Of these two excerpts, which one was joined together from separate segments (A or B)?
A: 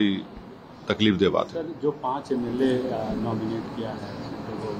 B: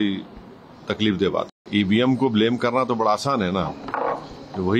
B